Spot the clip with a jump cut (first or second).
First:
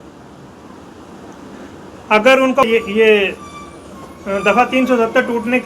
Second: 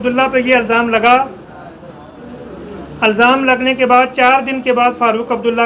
first